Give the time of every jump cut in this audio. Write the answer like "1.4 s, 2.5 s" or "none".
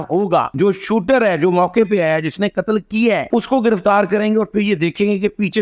none